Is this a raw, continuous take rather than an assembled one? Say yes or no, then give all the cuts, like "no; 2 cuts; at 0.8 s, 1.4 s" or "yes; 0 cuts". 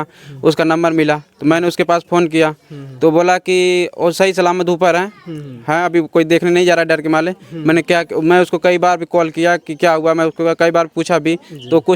yes; 0 cuts